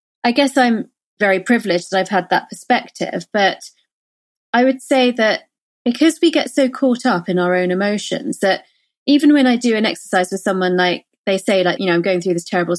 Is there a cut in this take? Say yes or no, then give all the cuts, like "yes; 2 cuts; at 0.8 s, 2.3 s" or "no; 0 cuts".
yes; 2 cuts; at 1.2 s, 11.8 s